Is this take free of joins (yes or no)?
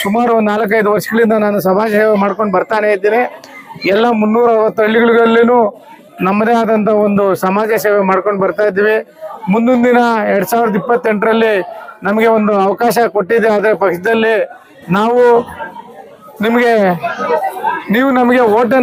yes